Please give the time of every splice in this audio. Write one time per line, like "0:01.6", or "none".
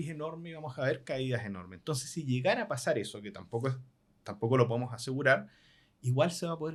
none